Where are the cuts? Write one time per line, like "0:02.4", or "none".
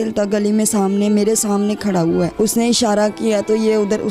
0:02.3